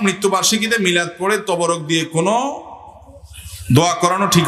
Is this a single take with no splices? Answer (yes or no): yes